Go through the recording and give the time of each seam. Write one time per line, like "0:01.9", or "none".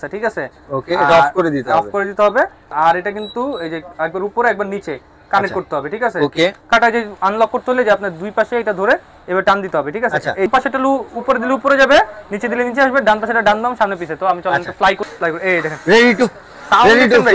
0:02.7
0:06.7
0:10.5
0:15.0